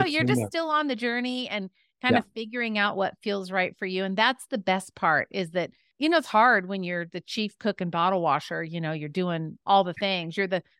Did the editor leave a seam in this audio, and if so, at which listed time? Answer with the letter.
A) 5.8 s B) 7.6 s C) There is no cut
A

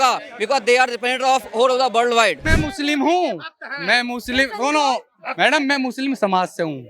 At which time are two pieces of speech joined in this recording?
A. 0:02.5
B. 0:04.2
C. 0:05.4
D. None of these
A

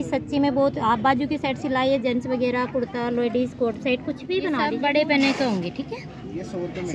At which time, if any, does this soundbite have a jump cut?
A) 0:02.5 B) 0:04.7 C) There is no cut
B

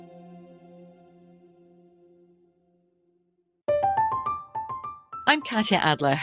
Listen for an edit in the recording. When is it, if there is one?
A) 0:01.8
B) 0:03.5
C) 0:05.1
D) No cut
B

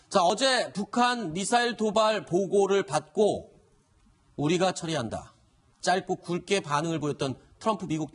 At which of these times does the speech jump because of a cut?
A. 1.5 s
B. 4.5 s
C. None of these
B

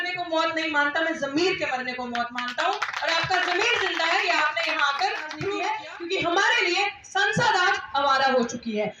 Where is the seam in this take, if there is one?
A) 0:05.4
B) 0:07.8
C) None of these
A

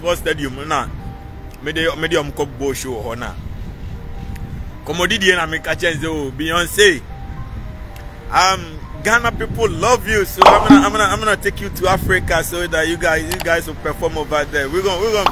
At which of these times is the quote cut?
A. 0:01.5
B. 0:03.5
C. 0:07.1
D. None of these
D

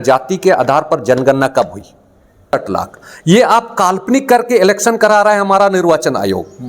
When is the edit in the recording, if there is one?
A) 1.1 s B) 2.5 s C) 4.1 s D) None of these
B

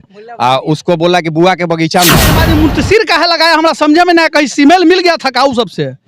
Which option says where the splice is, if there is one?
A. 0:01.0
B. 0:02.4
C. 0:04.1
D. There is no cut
B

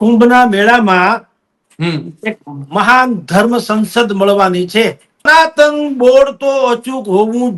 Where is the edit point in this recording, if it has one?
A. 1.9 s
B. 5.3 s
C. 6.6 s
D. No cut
B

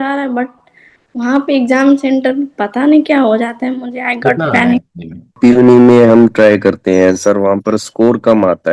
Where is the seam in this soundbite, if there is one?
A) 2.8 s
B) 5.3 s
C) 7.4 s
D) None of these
B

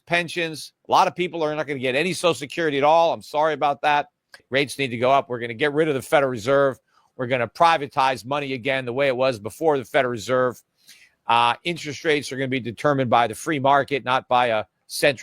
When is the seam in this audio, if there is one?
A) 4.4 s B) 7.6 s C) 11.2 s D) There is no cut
A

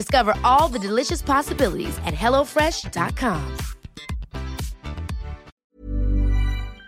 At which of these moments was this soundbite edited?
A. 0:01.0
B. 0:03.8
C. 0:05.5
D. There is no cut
C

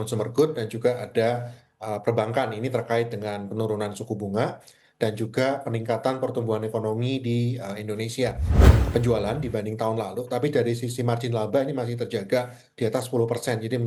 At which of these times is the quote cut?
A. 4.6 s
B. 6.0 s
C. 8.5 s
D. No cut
C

